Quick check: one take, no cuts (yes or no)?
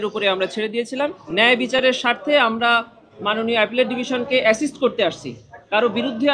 no